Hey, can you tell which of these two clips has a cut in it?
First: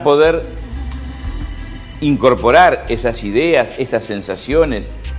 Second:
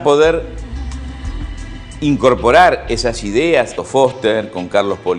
first; 1 cut; at 3.7 s

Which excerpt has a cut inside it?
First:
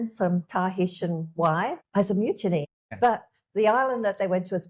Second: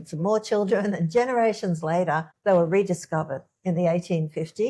first; 2 cuts; at 1.8 s, 2.7 s

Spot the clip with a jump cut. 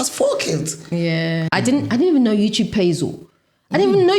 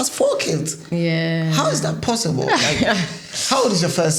first; 1 cut; at 1.5 s

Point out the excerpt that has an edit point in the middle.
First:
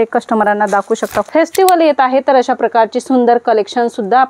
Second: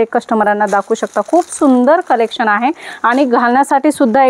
first; 1 cut; at 1.3 s

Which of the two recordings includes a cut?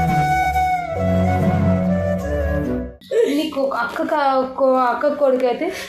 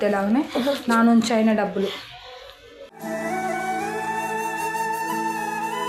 first; 1 cut; at 2.9 s

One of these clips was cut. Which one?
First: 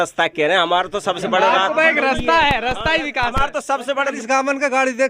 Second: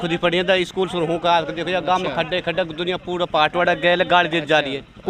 first; 1 cut; at 4.2 s

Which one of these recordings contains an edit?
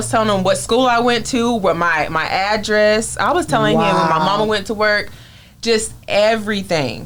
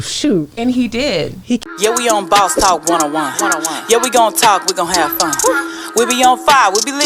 second; 1 cut; at 1.6 s

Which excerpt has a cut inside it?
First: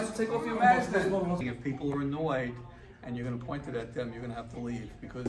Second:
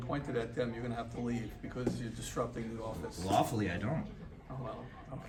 first; 1 cut; at 1.5 s

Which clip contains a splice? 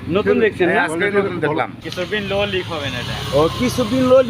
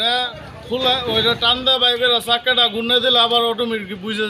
first; 1 cut; at 1.8 s

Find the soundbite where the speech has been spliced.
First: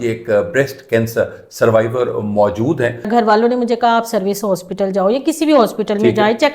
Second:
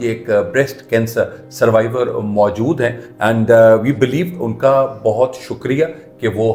first; 1 cut; at 3.1 s

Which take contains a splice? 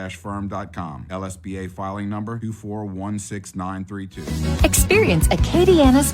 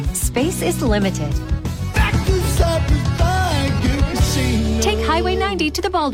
first; 1 cut; at 4.2 s

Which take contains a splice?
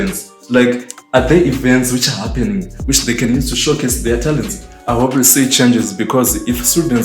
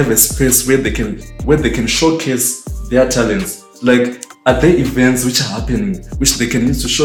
first; 1 cut; at 4.7 s

